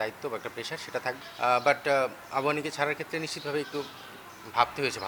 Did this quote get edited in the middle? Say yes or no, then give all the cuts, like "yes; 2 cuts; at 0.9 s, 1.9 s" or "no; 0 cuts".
no; 0 cuts